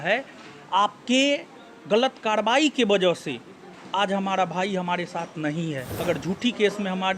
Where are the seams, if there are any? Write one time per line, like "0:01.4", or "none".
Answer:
0:05.9